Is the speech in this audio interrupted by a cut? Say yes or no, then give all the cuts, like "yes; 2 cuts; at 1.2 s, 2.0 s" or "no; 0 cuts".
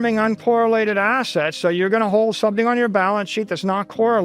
no; 0 cuts